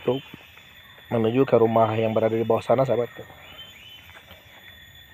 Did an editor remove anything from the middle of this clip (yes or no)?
no